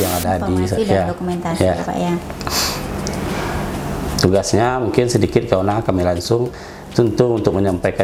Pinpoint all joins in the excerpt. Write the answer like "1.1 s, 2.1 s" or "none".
none